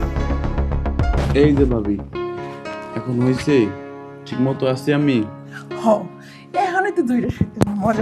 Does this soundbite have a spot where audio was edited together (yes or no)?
yes